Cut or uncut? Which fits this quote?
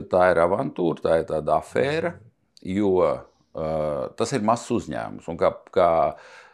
uncut